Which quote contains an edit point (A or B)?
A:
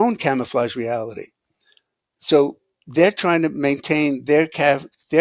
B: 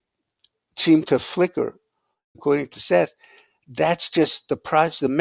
B